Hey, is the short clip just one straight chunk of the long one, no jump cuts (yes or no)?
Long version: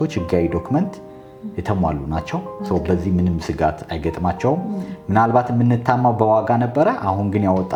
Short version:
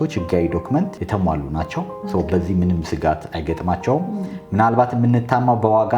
no